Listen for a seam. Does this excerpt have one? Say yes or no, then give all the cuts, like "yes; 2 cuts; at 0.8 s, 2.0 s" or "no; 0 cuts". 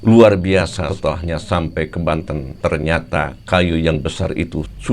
yes; 1 cut; at 0.9 s